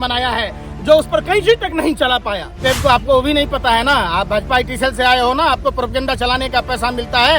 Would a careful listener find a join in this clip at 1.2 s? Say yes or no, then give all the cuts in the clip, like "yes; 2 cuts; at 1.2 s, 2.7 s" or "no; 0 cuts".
no; 1 cut; at 2.6 s